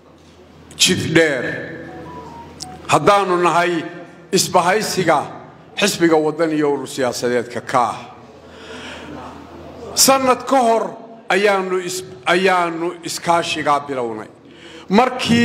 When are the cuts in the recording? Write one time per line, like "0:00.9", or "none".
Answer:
none